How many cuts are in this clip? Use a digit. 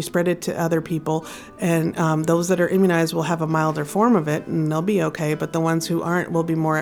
0